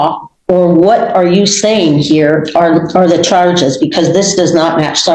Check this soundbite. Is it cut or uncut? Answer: uncut